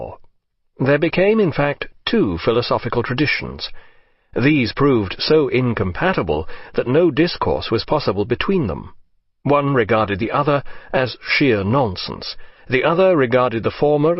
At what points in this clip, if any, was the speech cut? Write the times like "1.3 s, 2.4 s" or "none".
7.7 s